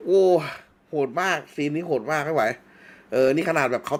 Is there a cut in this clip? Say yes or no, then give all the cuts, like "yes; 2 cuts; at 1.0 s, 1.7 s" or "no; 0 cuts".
no; 0 cuts